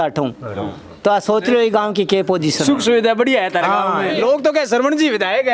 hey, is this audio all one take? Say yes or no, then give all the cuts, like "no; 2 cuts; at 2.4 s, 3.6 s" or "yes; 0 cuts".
no; 1 cut; at 4.1 s